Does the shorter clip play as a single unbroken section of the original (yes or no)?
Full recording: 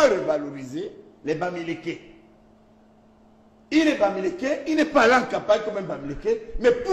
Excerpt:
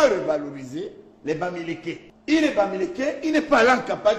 no